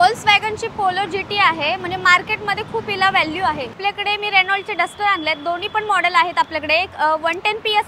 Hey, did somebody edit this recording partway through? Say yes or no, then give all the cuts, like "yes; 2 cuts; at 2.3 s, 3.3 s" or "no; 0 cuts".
yes; 1 cut; at 3.7 s